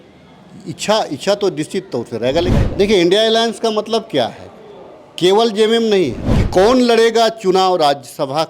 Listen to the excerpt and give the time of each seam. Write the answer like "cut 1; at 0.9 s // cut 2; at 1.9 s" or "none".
cut 1; at 2.5 s // cut 2; at 6.3 s